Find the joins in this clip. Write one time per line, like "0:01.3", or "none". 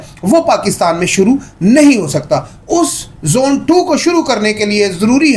none